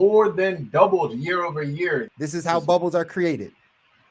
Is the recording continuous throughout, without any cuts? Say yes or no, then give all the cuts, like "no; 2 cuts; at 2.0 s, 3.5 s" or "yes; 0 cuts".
no; 1 cut; at 2.1 s